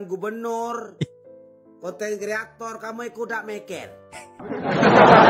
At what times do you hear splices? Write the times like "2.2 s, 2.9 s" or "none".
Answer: 4.2 s

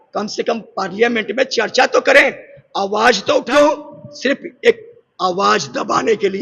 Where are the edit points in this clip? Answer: 3.4 s

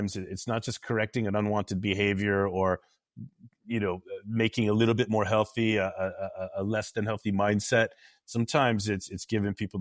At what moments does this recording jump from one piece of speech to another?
none

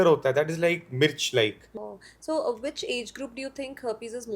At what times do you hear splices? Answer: 1.7 s

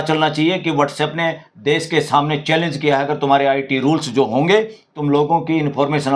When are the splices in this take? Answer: none

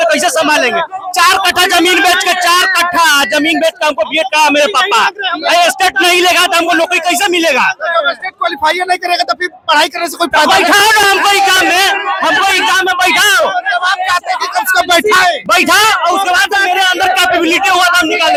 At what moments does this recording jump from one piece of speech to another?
none

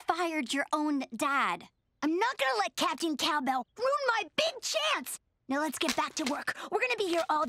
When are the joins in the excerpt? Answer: none

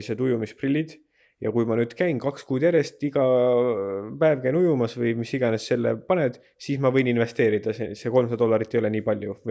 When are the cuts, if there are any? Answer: none

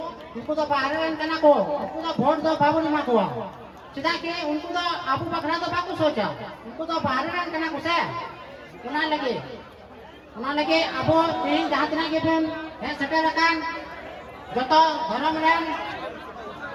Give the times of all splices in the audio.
none

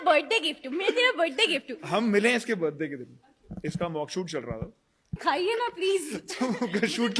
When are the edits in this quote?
5.2 s

